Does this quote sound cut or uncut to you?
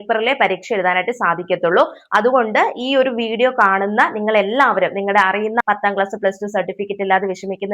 cut